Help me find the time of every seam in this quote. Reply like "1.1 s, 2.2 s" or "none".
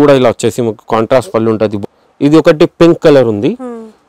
1.8 s